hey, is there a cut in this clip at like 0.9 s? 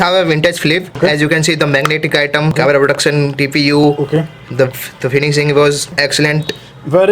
yes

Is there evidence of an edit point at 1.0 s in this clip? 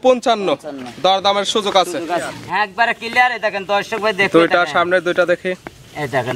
no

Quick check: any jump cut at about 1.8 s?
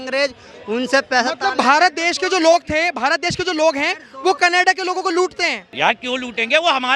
no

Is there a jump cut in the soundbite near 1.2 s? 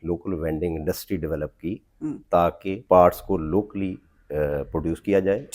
no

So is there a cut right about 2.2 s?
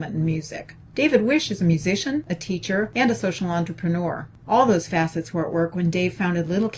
no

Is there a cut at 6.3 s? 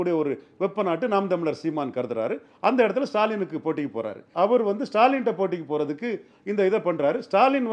no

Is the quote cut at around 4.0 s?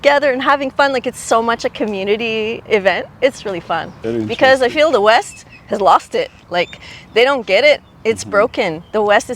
yes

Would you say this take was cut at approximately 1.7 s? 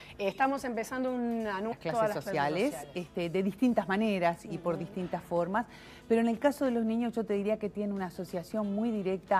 no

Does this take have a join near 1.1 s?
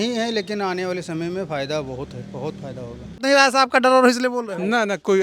no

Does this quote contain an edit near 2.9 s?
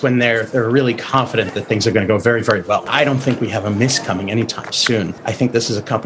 yes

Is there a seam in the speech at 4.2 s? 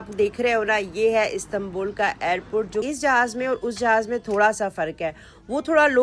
no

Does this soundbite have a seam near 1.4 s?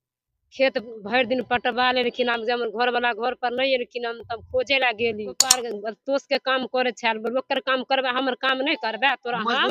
no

